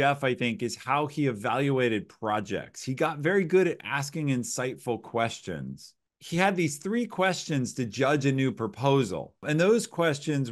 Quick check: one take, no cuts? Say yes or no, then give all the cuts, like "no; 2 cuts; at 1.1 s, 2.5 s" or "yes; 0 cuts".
no; 1 cut; at 9.4 s